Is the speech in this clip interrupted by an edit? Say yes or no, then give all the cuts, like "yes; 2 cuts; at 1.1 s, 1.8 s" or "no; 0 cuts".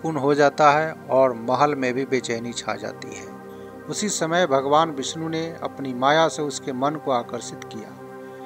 yes; 1 cut; at 3.3 s